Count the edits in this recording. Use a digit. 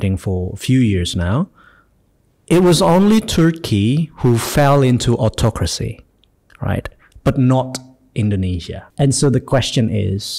1